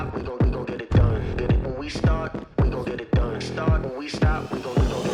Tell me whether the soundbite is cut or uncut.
uncut